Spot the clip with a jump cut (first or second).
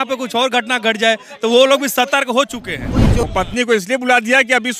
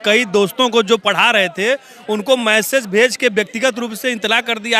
first